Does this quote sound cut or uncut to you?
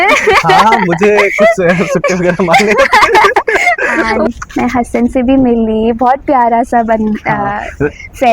cut